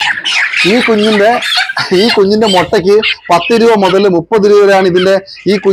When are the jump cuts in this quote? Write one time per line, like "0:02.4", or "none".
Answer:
none